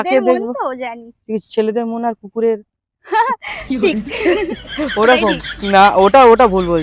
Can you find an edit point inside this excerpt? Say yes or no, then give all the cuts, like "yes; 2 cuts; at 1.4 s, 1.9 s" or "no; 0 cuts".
no; 0 cuts